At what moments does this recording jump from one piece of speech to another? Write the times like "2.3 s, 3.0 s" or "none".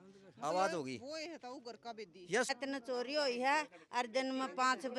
2.5 s